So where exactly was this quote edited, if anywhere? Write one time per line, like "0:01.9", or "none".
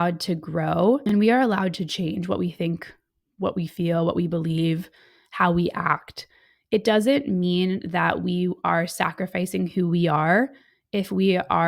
0:01.0

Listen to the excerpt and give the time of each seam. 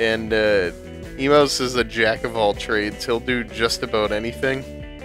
0:02.4

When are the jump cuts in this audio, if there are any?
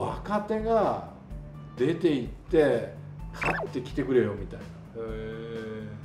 none

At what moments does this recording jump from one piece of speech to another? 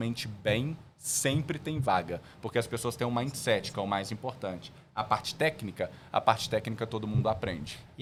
none

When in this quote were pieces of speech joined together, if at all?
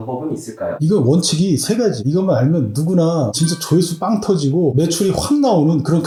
none

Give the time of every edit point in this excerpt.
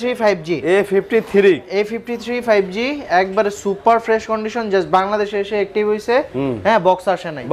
none

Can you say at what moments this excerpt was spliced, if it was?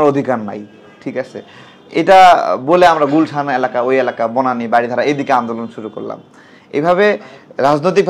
none

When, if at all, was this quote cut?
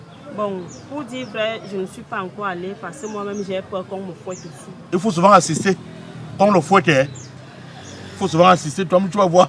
none

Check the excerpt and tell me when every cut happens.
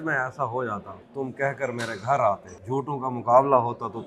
0:01.0
0:02.5

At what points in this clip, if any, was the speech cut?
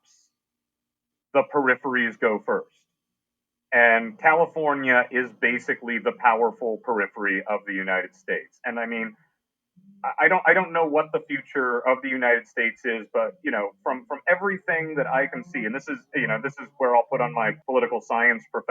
0:17.6

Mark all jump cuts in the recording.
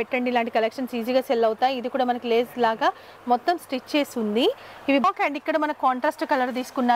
0:05.0

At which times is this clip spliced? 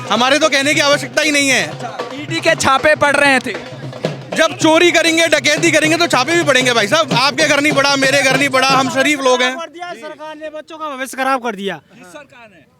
none

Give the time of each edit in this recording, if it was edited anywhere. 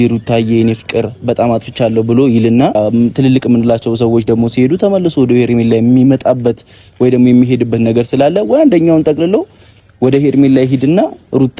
0:02.8

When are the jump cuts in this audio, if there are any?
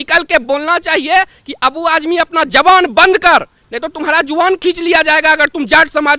none

